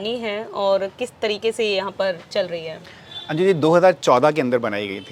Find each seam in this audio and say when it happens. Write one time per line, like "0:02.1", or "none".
none